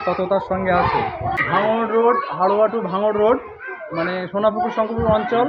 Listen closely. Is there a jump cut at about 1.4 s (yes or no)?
yes